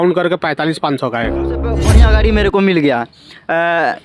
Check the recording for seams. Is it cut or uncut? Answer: cut